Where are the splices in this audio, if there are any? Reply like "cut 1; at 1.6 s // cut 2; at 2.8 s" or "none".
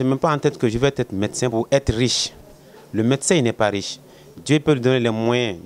cut 1; at 1.5 s

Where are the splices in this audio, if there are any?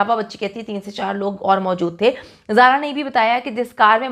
none

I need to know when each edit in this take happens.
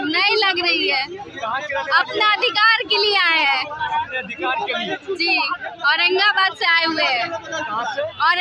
none

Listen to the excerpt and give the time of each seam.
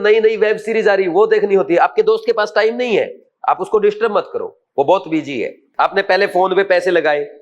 cut 1; at 5.6 s

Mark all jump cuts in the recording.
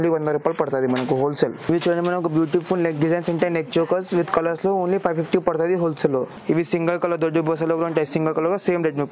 cut 1; at 1.6 s // cut 2; at 6.3 s

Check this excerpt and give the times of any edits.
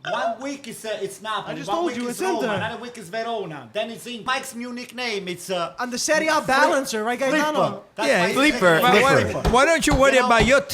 cut 1; at 4.2 s

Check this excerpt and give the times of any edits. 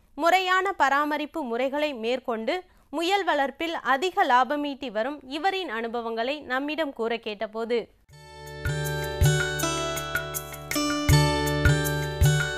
none

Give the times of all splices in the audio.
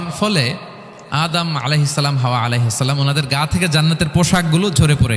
none

